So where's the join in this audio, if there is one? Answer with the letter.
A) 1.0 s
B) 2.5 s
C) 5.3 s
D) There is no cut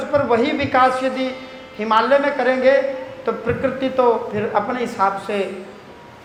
D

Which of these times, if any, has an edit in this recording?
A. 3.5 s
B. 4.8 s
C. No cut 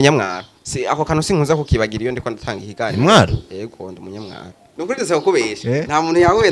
B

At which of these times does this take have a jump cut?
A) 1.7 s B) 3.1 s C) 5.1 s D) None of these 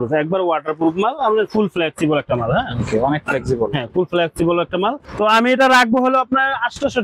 C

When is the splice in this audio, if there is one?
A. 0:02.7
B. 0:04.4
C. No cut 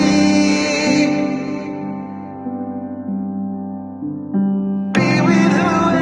C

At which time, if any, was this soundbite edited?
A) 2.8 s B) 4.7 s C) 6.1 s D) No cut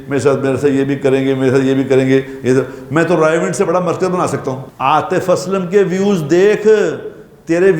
B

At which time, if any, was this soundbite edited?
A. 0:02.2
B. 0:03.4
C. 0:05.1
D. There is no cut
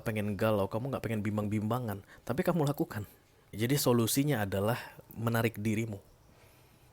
B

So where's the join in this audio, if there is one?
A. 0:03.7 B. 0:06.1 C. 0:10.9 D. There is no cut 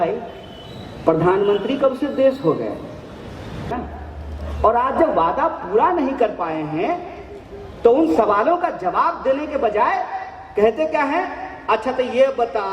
A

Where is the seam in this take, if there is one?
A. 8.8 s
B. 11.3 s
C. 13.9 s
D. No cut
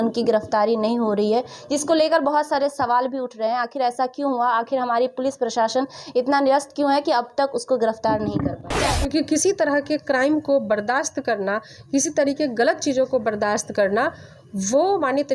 A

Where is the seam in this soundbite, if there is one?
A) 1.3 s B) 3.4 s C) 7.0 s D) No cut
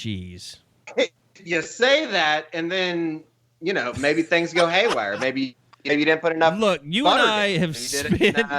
A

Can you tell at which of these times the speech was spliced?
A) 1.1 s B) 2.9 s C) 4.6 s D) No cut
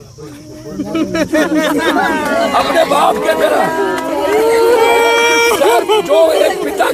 D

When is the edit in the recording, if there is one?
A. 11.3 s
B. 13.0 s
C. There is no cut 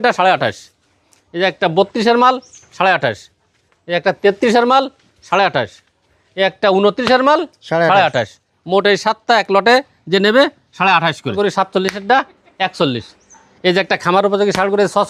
A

